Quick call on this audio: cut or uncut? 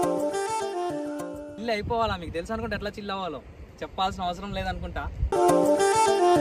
uncut